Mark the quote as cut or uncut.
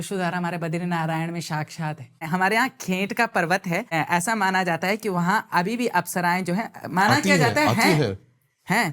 cut